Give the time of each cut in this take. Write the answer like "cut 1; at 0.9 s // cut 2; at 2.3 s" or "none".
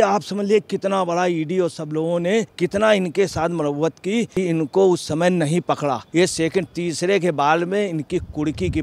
cut 1; at 2.5 s // cut 2; at 4.3 s // cut 3; at 6.0 s

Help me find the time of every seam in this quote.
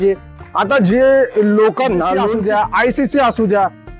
cut 1; at 2.2 s

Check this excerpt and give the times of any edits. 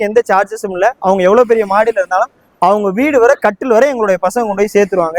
none

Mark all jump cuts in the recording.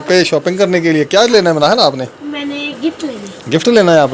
none

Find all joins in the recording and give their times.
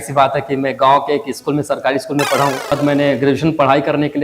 cut 1; at 2.7 s

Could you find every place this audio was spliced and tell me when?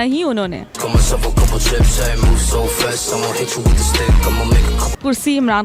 none

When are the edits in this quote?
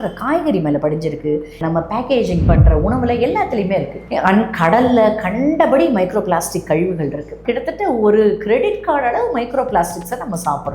cut 1; at 1.6 s // cut 2; at 7.4 s

